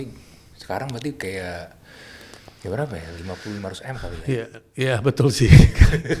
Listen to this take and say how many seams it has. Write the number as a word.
zero